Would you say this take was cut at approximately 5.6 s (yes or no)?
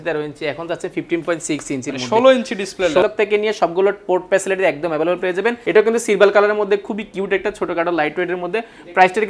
yes